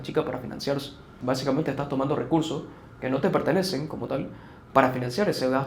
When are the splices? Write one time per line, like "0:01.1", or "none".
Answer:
0:01.0